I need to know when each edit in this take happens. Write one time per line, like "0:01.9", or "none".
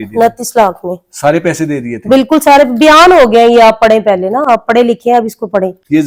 none